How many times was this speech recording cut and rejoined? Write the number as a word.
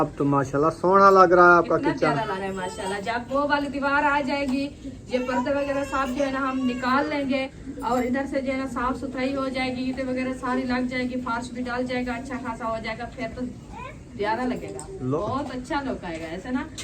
three